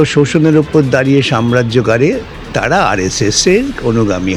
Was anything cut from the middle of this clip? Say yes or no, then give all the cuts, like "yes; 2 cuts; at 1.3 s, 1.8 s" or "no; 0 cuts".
no; 0 cuts